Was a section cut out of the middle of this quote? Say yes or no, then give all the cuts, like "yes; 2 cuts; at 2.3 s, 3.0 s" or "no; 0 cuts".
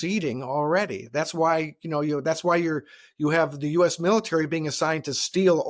no; 0 cuts